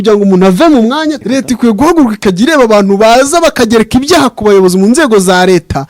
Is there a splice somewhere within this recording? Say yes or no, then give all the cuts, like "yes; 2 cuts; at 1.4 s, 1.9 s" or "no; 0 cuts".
yes; 1 cut; at 1.2 s